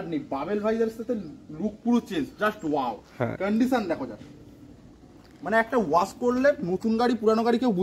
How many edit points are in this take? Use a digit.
0